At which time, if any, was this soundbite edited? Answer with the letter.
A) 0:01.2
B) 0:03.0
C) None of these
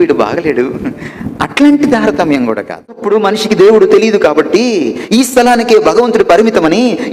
B